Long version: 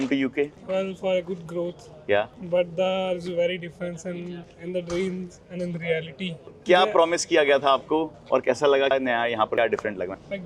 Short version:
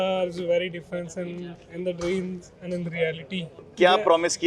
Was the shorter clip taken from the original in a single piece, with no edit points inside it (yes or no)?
yes